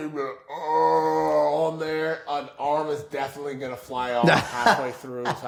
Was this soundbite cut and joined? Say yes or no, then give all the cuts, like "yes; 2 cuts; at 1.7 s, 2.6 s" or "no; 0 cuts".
no; 0 cuts